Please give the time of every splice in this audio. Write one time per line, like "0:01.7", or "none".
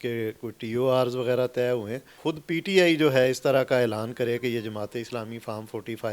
0:02.1